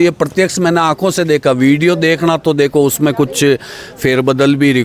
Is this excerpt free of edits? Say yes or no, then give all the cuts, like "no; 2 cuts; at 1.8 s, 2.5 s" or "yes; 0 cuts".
yes; 0 cuts